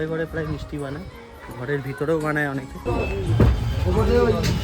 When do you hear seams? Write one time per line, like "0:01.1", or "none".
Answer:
0:02.7